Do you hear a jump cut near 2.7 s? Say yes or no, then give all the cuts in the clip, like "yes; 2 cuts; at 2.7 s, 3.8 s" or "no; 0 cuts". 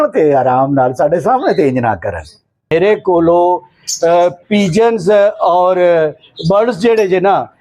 yes; 1 cut; at 2.7 s